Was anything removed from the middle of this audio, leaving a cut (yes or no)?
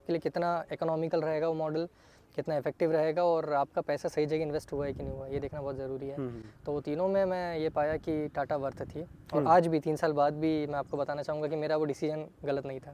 no